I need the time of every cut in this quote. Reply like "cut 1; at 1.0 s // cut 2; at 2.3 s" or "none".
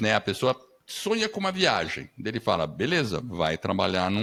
none

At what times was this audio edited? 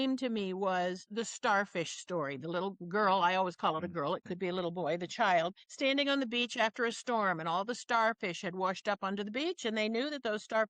cut 1; at 1.1 s // cut 2; at 5.6 s

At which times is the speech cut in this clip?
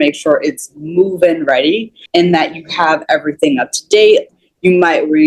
cut 1; at 1.9 s // cut 2; at 4.3 s

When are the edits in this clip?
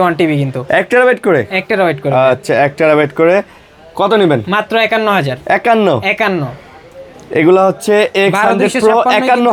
none

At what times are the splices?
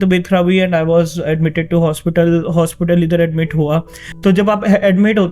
cut 1; at 4.0 s

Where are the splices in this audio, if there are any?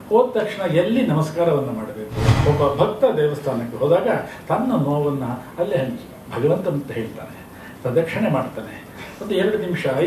cut 1; at 2.2 s

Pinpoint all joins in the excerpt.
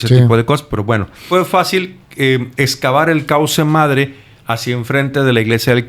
cut 1; at 1.2 s

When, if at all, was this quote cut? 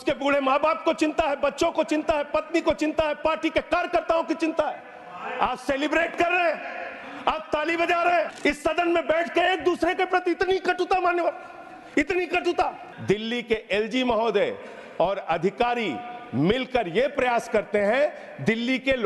cut 1; at 8.3 s // cut 2; at 12.9 s

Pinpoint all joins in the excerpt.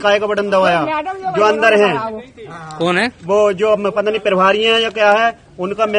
none

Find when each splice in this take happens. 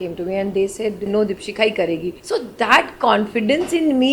cut 1; at 1.1 s // cut 2; at 2.1 s

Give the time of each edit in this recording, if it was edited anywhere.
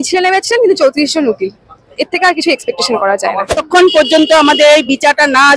cut 1; at 3.6 s

